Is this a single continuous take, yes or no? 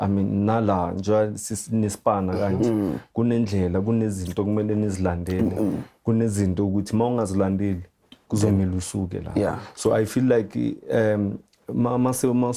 yes